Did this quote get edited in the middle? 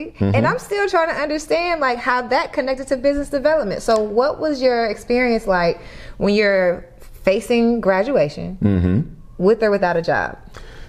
no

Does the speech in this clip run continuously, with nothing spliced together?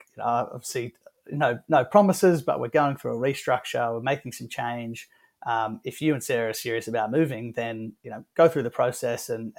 yes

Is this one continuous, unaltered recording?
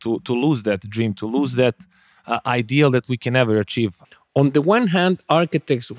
no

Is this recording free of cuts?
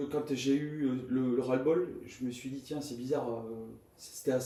yes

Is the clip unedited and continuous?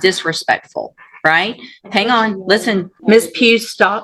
no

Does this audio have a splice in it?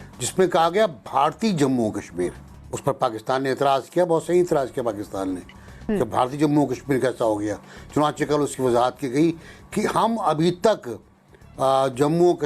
no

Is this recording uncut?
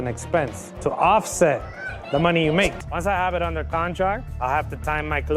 no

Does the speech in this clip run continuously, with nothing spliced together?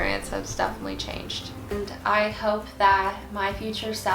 no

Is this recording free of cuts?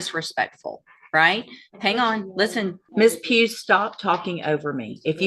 no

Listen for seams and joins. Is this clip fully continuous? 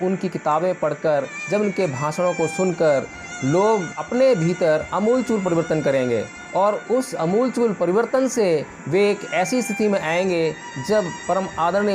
no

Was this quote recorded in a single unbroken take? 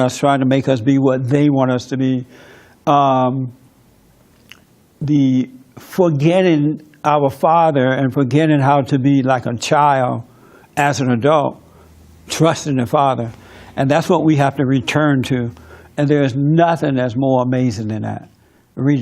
no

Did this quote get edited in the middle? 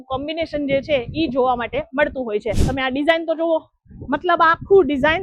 yes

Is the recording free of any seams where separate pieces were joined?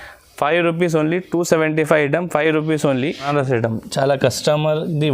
no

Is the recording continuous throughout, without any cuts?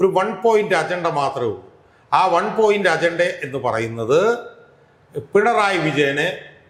yes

